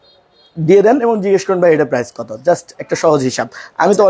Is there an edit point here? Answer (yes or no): no